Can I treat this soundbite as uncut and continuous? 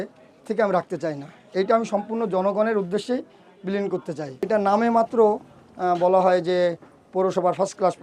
no; 1 cut; at 4.5 s

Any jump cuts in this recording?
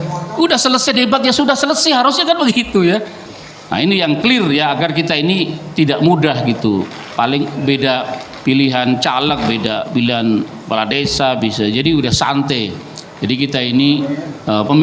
yes; 1 cut; at 3.2 s

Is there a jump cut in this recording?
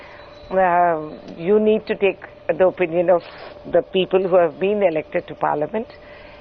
yes; 1 cut; at 3.0 s

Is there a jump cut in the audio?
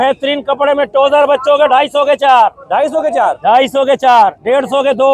no; 0 cuts

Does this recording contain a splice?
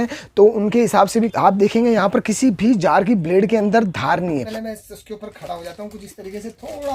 yes; 2 cuts; at 1.3 s, 4.5 s

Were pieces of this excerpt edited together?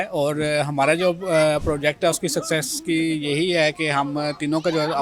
no; 0 cuts

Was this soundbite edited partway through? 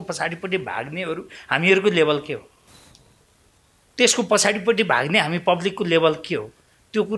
no; 0 cuts

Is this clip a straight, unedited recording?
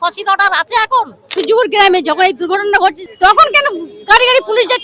no; 2 cuts; at 1.2 s, 3.1 s

